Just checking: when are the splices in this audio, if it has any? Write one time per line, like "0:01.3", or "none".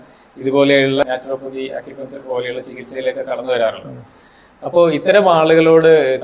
0:01.1